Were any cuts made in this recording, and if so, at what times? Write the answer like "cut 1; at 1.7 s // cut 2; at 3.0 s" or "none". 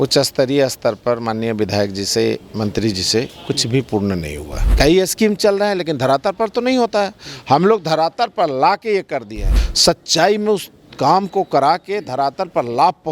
cut 1; at 4.6 s // cut 2; at 9.4 s